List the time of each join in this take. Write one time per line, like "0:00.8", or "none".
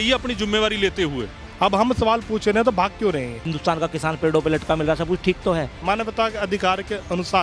0:01.4
0:03.5
0:05.7

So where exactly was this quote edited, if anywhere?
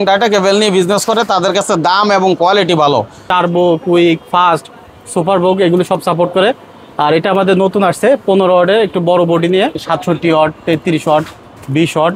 0:03.3
0:09.9

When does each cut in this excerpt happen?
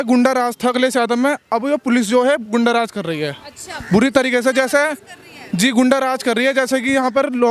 none

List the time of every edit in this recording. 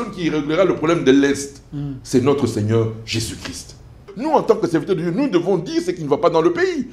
0:04.1

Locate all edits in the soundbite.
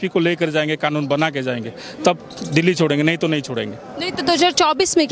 none

